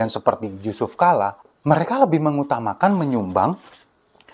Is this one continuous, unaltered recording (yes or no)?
no